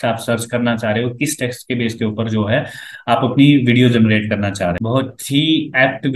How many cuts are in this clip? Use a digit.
1